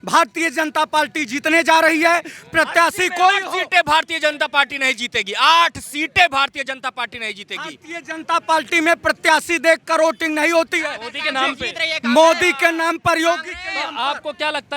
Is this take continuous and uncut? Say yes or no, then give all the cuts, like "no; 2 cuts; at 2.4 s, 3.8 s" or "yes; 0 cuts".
yes; 0 cuts